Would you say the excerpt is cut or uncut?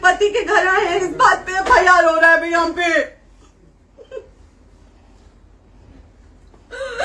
uncut